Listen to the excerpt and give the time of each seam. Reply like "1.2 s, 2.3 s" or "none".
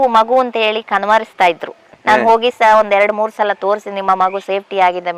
1.8 s